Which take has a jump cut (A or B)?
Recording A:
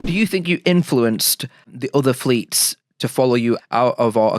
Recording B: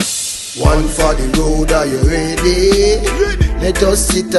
A